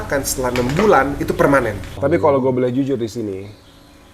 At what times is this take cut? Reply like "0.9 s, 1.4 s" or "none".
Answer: 1.9 s